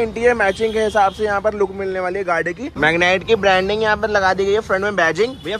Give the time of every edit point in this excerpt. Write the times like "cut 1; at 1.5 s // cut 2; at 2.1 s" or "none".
cut 1; at 2.7 s

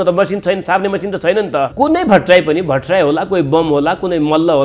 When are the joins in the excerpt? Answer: cut 1; at 1.7 s

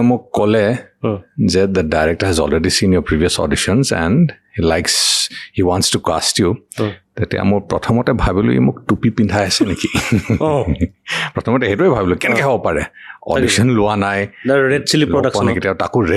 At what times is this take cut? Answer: none

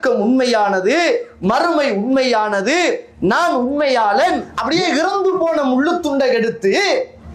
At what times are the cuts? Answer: cut 1; at 4.5 s

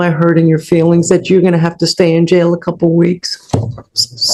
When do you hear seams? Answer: none

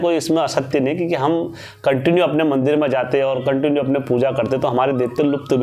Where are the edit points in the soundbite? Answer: none

